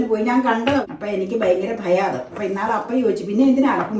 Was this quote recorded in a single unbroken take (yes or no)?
no